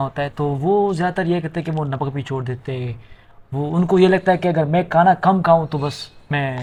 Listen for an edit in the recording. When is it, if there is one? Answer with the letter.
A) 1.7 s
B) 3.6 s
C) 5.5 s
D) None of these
D